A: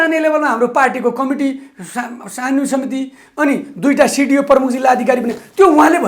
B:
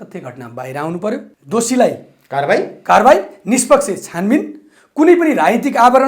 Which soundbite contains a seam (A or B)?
B